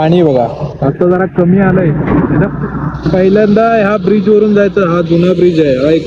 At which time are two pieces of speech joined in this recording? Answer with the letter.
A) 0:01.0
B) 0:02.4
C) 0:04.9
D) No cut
D